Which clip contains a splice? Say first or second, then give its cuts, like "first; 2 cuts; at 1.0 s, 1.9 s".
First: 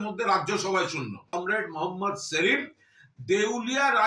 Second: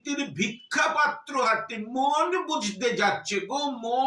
first; 1 cut; at 1.3 s